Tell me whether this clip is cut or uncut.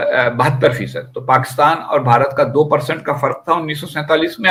uncut